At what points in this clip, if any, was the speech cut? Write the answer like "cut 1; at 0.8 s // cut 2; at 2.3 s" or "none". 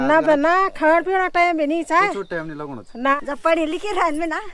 cut 1; at 3.1 s